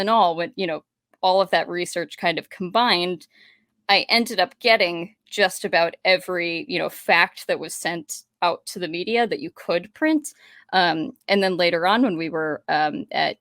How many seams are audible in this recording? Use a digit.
0